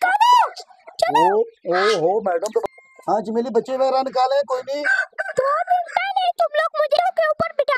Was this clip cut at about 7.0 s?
yes; 2 cuts; at 2.6 s, 7.0 s

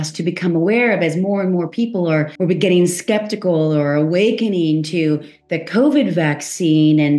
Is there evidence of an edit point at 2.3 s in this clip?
yes; 1 cut; at 2.3 s

